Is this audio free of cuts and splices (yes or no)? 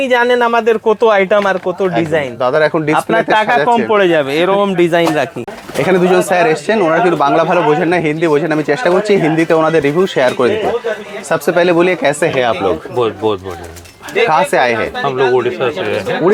yes